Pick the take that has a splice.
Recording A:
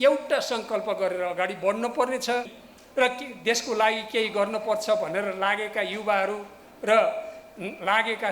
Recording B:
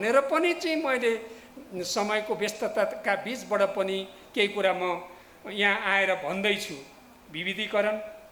A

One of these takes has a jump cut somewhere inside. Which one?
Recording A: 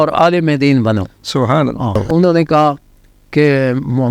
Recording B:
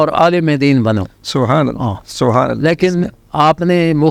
A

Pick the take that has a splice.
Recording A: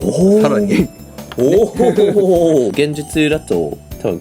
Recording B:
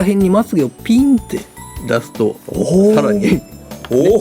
A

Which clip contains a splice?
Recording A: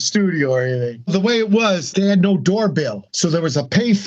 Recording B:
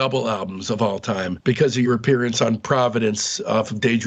A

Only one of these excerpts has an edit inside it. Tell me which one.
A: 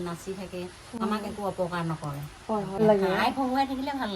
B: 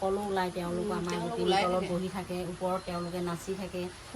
A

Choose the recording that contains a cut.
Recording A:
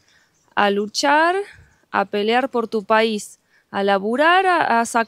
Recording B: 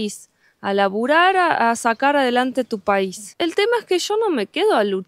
B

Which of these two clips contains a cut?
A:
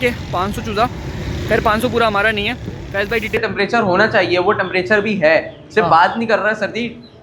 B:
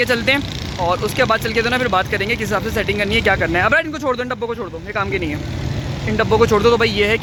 A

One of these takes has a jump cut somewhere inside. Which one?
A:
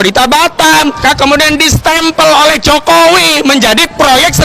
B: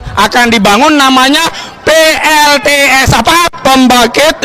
A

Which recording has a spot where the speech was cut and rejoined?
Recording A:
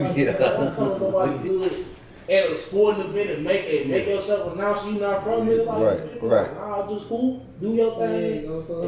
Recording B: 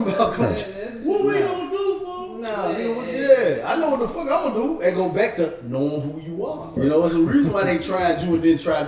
B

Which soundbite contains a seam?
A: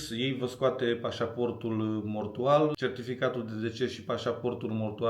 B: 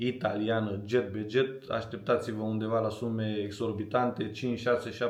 A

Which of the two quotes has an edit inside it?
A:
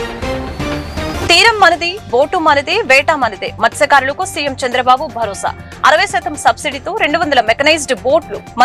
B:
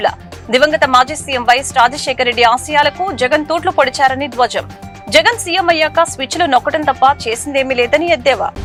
A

